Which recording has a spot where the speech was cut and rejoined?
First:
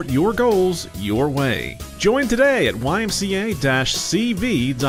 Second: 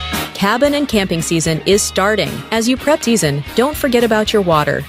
second; 1 cut; at 3.0 s

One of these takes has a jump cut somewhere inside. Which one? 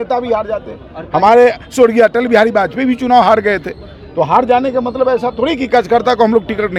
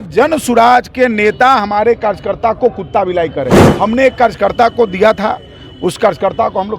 second; 1 cut; at 3.6 s

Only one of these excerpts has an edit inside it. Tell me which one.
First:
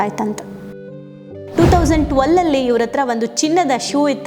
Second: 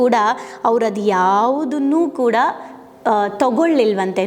first; 1 cut; at 1.0 s

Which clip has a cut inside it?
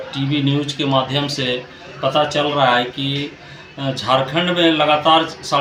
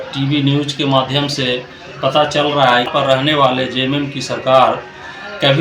second; 1 cut; at 2.9 s

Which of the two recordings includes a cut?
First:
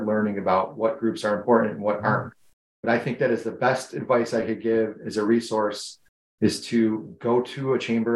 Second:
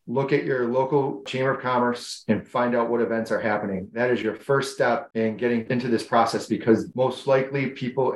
second; 3 cuts; at 1.3 s, 5.6 s, 6.9 s

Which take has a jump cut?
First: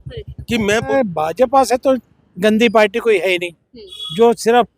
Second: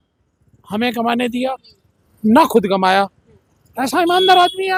first; 1 cut; at 0.9 s

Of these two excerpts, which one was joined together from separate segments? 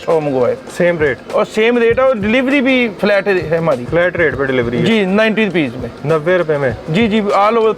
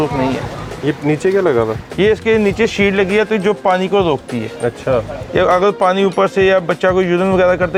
first; 2 cuts; at 2.9 s, 3.8 s

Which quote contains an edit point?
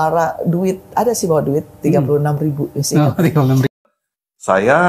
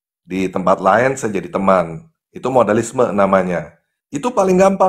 first; 1 cut; at 3.7 s

